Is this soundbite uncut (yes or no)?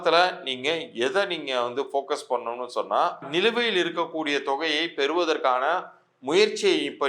no